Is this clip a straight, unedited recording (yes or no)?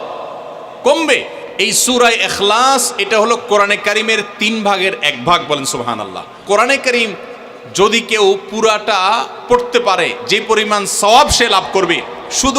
no